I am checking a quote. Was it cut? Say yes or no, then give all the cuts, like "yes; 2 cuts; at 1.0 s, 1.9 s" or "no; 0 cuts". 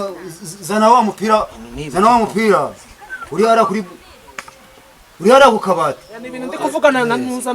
yes; 1 cut; at 6.6 s